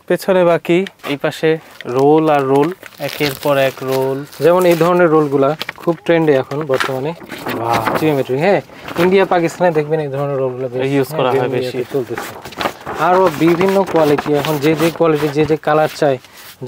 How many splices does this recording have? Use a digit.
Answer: 0